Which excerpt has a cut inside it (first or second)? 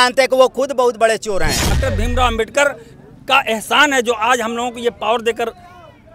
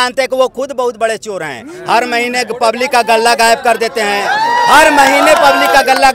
first